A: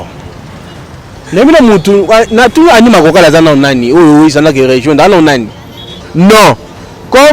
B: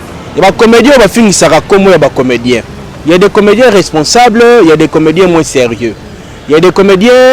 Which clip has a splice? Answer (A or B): A